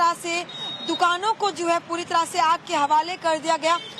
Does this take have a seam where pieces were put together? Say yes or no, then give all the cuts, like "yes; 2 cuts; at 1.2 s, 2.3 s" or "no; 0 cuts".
no; 0 cuts